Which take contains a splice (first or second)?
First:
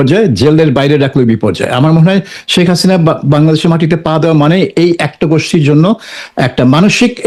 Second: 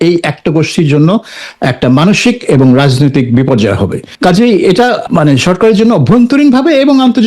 second